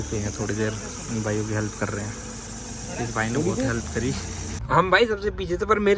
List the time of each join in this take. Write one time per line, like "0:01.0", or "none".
0:04.5